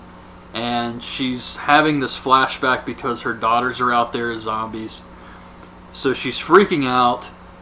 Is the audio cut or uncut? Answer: cut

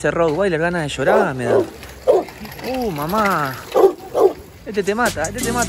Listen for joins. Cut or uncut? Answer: uncut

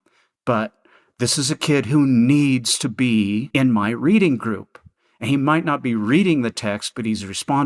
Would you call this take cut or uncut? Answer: cut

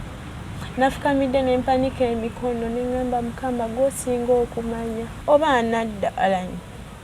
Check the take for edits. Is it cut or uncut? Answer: cut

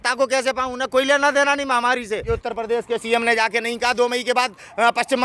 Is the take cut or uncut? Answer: cut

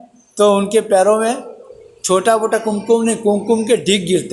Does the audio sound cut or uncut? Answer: uncut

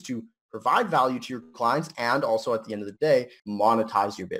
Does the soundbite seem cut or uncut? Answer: cut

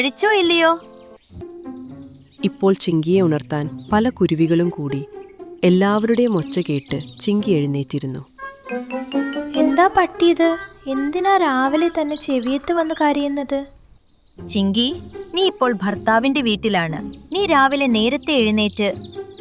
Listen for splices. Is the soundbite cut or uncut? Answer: cut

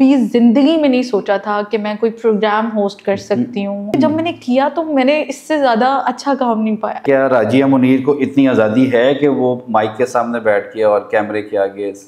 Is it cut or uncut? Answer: cut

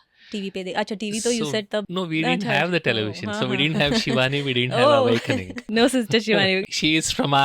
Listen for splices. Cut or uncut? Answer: cut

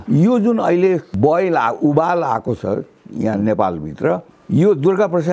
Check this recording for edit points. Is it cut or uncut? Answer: cut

